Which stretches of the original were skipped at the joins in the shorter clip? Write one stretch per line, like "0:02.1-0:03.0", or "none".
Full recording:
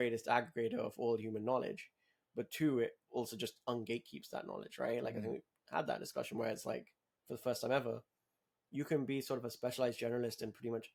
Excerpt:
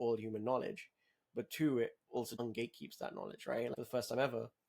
0:03.4-0:03.7
0:05.1-0:07.3